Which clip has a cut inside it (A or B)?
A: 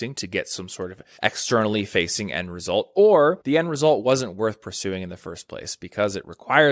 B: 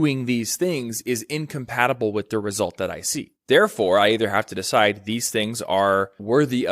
A